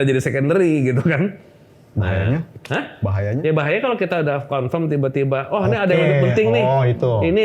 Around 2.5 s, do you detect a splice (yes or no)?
no